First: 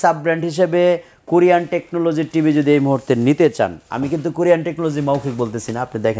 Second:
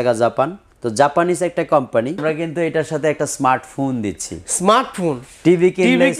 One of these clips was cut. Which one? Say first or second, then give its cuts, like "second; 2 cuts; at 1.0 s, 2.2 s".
second; 1 cut; at 2.2 s